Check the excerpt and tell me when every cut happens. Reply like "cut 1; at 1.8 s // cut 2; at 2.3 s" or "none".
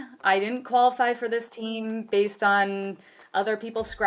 none